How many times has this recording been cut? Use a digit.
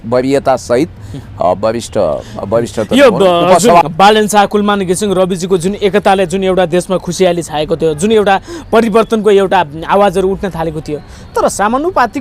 1